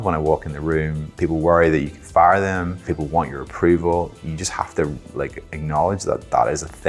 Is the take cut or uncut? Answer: cut